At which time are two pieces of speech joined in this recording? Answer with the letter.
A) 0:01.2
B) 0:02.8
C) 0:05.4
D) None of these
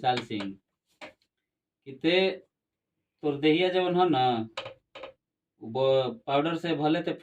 D